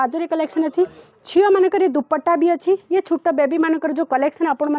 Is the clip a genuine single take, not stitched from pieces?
yes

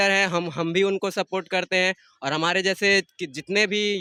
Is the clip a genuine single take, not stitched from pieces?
yes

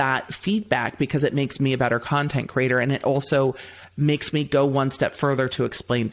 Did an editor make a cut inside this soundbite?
no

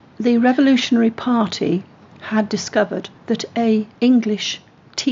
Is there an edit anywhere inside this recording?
yes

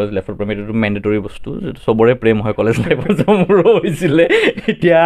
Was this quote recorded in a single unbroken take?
yes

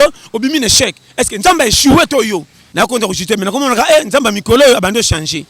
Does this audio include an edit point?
yes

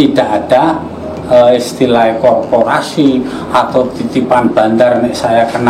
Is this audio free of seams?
yes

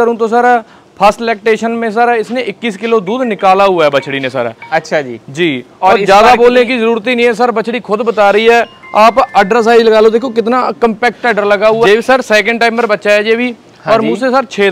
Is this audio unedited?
no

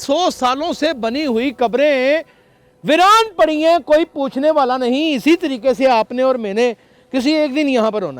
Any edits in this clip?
no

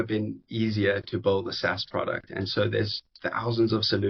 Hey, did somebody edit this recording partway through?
no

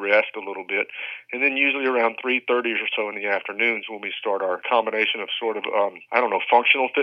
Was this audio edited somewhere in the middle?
yes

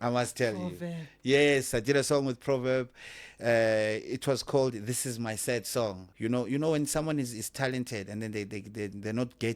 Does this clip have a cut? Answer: yes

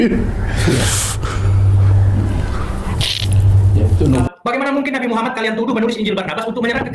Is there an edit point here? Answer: yes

